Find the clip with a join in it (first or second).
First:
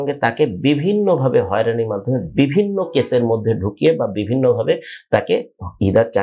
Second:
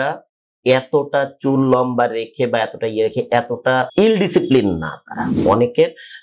second